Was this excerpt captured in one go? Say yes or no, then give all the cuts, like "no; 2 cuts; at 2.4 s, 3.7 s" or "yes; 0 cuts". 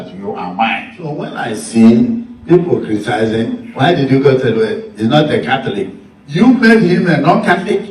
no; 1 cut; at 6.7 s